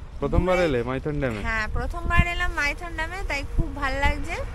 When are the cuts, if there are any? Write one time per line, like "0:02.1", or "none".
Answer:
none